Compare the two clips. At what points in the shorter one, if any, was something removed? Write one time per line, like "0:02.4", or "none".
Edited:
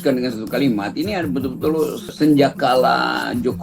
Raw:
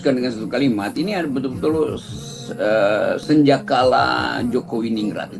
0:02.1